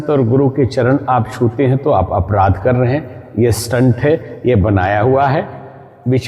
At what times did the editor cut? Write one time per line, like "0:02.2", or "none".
none